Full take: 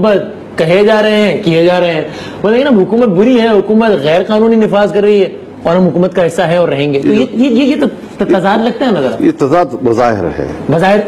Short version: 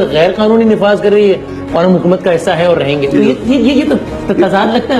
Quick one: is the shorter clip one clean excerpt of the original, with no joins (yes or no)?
yes